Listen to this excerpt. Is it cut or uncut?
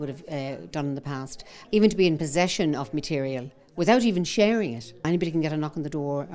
cut